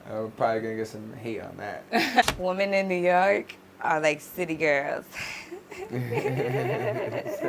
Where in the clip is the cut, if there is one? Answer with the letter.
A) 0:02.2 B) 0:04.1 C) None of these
A